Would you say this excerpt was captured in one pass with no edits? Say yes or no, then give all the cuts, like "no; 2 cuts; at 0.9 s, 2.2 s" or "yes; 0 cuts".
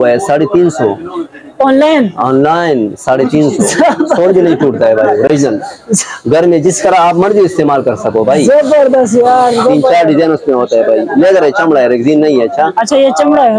yes; 0 cuts